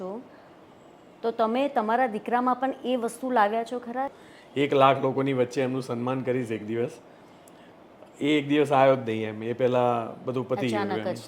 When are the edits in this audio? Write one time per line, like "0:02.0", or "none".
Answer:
0:04.1